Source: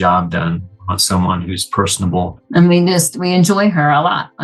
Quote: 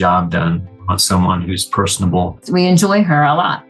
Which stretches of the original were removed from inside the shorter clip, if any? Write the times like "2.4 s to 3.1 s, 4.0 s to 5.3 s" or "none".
2.4 s to 3.1 s